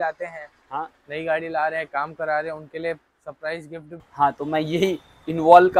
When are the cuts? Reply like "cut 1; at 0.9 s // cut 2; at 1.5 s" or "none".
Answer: cut 1; at 4.0 s